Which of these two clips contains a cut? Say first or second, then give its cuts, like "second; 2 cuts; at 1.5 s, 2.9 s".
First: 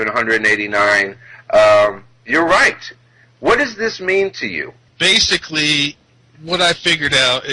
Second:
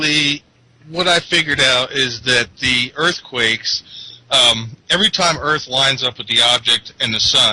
first; 1 cut; at 4.0 s